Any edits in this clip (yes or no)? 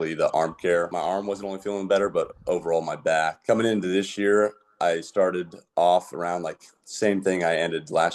yes